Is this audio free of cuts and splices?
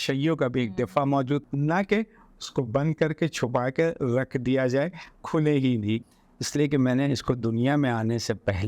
no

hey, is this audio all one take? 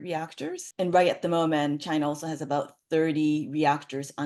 yes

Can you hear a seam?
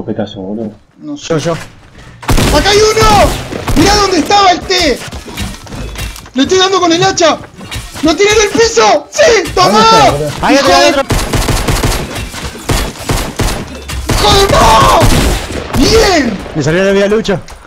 yes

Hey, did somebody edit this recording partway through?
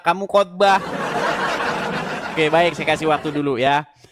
no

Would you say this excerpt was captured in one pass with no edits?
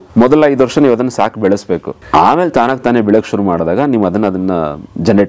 no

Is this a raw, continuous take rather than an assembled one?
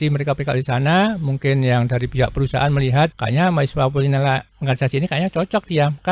no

